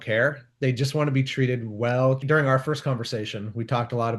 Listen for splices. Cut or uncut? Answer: cut